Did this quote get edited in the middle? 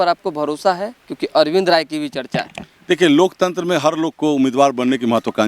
no; 0 cuts

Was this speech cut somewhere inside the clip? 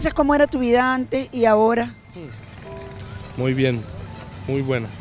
no; 0 cuts

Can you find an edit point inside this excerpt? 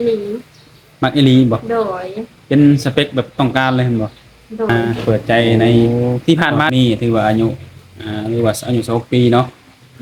yes; 3 cuts; at 4.7 s, 5.9 s, 6.7 s

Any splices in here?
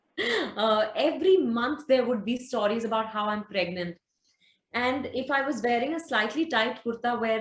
no; 0 cuts

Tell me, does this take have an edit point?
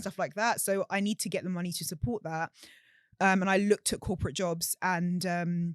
no; 0 cuts

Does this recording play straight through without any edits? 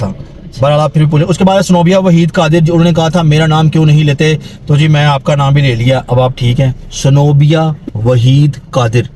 yes; 0 cuts

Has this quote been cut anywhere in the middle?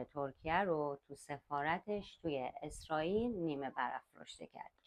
no; 0 cuts

